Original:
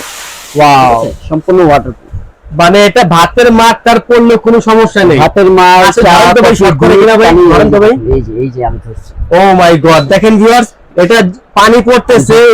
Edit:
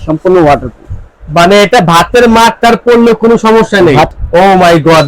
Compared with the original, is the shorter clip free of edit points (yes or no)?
no